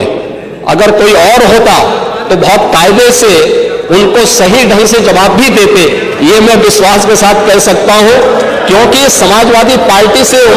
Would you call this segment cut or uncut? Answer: uncut